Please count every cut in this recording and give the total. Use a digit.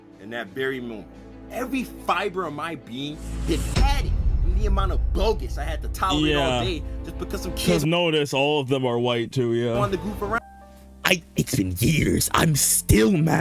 1